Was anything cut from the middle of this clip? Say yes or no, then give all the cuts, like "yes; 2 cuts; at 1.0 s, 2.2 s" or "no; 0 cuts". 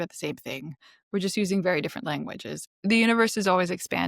yes; 1 cut; at 2.5 s